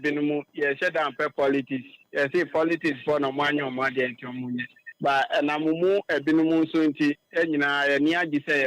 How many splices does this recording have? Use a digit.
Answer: 0